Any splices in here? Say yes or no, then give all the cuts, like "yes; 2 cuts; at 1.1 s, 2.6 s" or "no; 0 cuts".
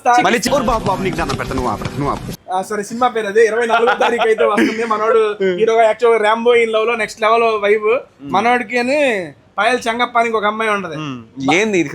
no; 0 cuts